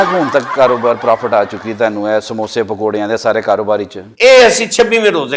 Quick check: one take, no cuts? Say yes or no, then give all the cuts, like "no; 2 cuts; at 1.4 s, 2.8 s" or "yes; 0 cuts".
yes; 0 cuts